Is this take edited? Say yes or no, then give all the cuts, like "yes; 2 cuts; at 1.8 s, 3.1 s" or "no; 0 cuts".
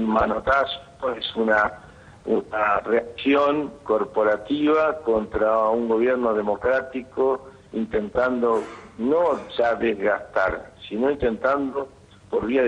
no; 0 cuts